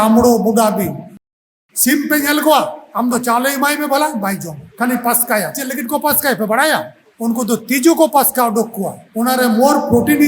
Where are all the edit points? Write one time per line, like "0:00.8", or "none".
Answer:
0:01.2